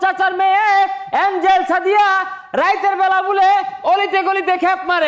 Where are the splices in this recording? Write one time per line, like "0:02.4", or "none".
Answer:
none